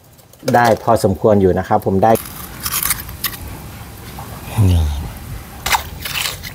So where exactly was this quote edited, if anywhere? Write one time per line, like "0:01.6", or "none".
0:02.2
0:05.6